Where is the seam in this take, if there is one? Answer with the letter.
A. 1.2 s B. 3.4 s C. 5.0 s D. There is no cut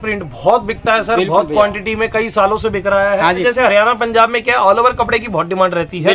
B